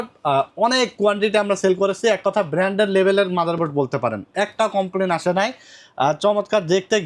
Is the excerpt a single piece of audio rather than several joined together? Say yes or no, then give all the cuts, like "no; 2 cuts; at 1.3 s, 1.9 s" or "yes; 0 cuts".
yes; 0 cuts